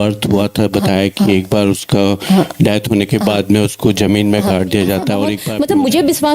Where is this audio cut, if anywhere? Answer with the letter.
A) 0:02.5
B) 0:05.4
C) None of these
B